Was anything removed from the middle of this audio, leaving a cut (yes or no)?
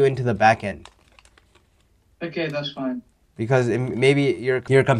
no